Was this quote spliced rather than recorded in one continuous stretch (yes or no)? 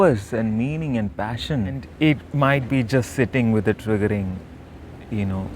yes